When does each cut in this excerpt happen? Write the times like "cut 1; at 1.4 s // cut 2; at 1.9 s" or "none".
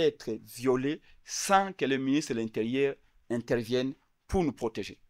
none